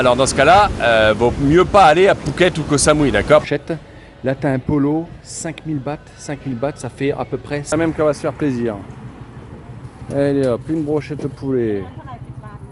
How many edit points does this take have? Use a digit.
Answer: 2